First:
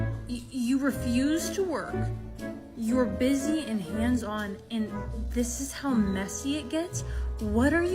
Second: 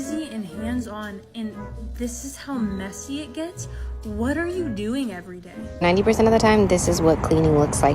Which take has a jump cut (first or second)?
second